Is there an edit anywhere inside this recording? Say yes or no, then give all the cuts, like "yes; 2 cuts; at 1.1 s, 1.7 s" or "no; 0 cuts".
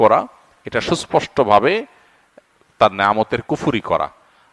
no; 0 cuts